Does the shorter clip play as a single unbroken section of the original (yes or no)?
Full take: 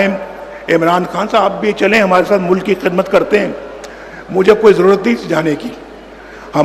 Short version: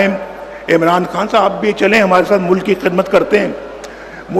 yes